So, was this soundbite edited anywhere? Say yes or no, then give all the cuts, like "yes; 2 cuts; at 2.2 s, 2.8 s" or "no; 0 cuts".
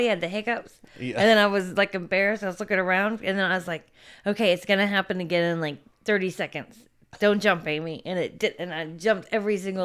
no; 0 cuts